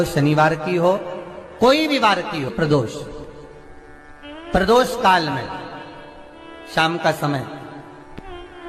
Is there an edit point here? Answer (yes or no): yes